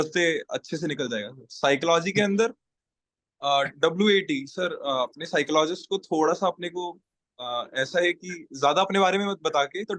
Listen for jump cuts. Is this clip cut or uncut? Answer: uncut